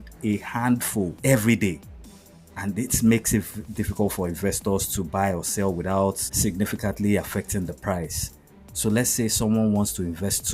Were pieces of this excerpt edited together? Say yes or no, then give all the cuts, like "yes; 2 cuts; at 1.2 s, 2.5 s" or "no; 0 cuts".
yes; 2 cuts; at 1.1 s, 6.3 s